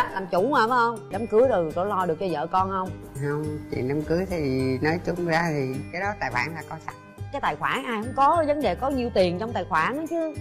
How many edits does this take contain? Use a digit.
1